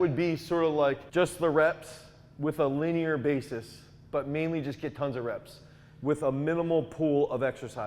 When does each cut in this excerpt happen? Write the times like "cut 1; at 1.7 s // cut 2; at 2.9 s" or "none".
cut 1; at 1.0 s